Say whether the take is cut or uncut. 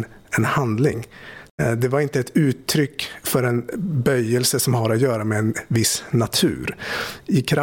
cut